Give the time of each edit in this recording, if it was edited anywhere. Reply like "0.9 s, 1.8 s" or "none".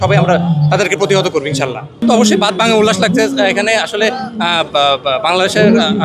none